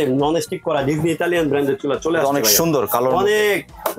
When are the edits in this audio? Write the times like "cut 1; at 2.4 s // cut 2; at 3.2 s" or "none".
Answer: none